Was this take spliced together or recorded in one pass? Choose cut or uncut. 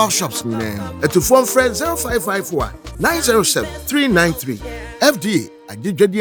uncut